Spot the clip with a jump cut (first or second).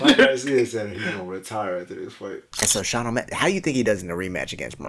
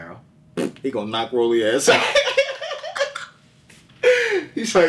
first